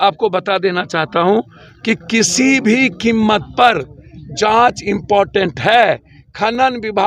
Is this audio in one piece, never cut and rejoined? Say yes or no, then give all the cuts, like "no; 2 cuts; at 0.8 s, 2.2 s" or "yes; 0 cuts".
yes; 0 cuts